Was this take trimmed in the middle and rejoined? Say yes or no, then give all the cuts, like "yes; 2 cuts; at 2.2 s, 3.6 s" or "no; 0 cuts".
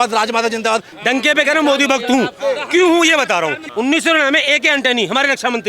yes; 2 cuts; at 0.9 s, 3.6 s